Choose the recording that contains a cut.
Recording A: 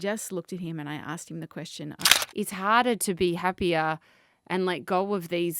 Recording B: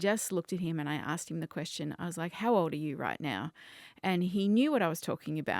A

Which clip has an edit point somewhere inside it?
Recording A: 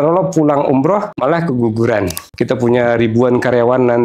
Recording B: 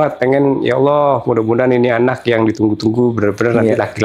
A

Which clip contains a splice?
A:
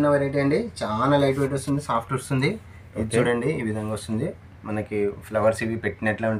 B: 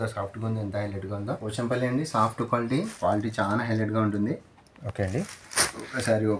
B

